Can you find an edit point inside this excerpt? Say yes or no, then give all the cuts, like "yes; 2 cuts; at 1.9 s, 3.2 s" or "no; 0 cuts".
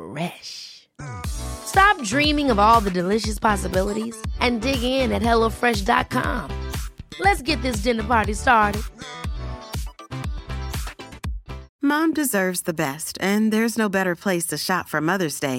yes; 1 cut; at 11.7 s